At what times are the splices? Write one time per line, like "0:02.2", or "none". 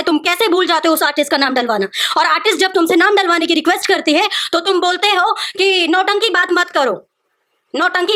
none